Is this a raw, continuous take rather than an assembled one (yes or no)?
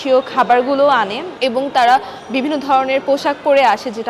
no